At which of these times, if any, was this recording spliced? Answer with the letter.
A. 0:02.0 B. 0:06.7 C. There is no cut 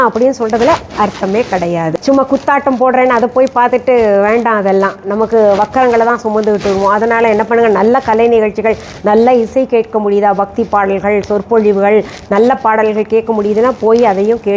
A